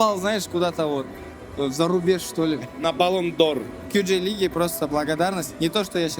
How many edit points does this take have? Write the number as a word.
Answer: two